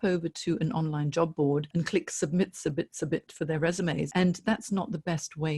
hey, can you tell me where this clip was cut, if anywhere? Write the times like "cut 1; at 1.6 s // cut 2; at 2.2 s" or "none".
cut 1; at 1.7 s // cut 2; at 4.1 s